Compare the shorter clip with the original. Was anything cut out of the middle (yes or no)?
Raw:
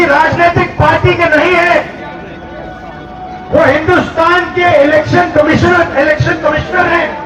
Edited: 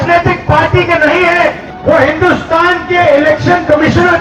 yes